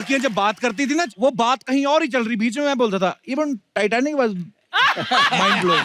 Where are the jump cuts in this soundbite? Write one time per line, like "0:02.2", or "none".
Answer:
0:01.1